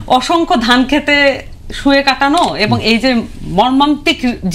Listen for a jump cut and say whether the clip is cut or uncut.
uncut